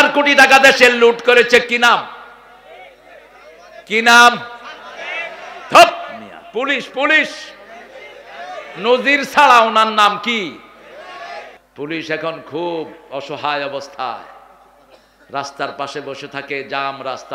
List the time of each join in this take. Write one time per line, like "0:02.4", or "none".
0:11.6